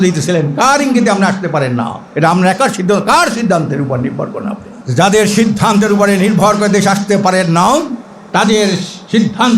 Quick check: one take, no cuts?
no; 2 cuts; at 2.0 s, 4.7 s

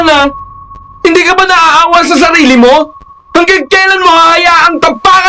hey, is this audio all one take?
yes; 0 cuts

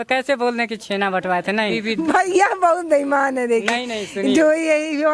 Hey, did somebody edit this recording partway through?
yes; 1 cut; at 1.8 s

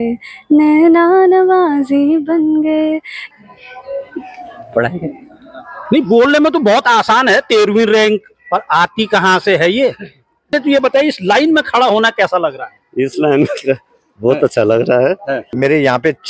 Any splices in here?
yes; 3 cuts; at 3.1 s, 10.5 s, 15.4 s

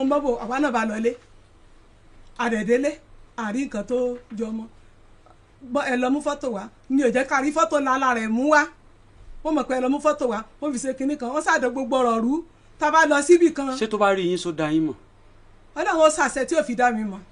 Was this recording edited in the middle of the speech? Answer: no; 0 cuts

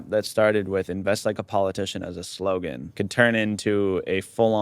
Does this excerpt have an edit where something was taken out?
yes; 1 cut; at 2.8 s

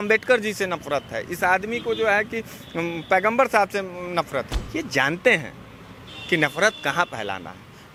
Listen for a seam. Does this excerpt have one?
no; 0 cuts

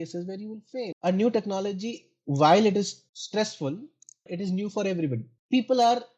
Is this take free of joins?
no; 3 cuts; at 0.9 s, 4.3 s, 5.3 s

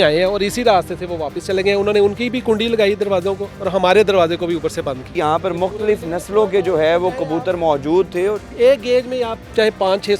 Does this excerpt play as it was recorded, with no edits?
no; 2 cuts; at 5.1 s, 8.5 s

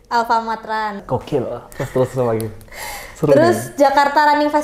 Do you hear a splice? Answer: yes; 1 cut; at 1.0 s

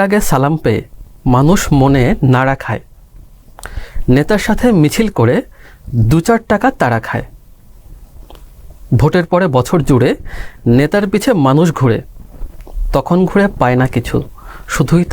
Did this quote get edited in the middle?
no; 0 cuts

